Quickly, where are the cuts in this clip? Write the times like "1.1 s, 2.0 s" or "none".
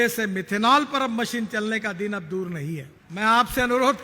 3.0 s